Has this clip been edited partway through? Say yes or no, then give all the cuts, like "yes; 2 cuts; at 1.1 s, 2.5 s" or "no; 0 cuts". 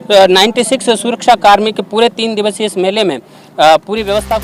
no; 0 cuts